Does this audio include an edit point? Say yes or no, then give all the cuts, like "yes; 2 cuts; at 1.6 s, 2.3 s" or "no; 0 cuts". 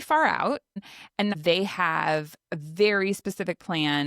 yes; 1 cut; at 1.2 s